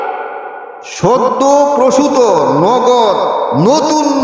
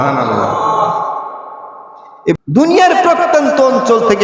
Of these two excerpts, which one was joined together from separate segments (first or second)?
second